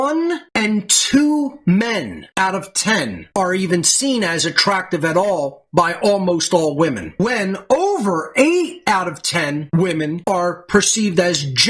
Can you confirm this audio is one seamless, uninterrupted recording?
yes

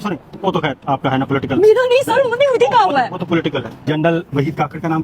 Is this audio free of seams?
no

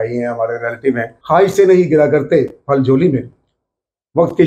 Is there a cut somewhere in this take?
yes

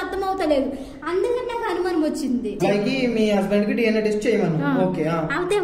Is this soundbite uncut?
no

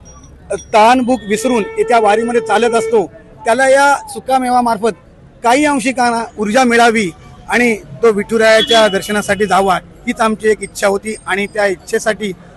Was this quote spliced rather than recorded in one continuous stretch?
no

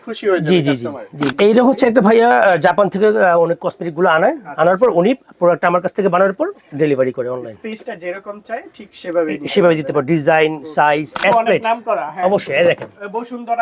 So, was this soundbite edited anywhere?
yes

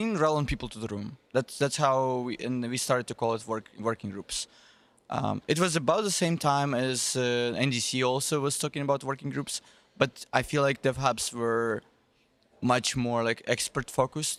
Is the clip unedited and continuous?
yes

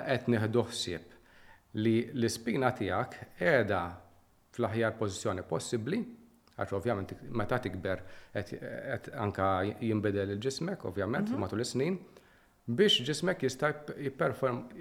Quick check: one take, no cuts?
yes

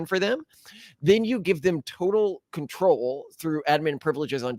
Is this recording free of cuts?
yes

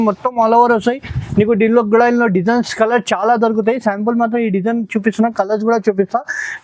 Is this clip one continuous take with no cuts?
yes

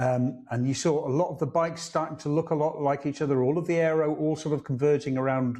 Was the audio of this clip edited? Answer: no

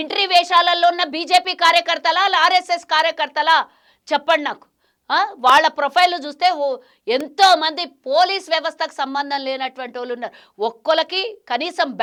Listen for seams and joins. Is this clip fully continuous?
yes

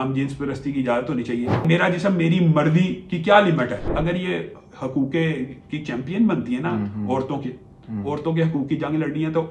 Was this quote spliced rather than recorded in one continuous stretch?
yes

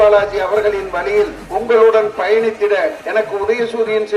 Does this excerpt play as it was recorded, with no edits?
no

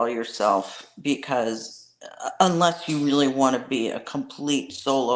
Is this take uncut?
yes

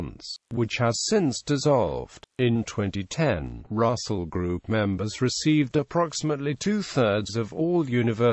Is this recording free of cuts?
no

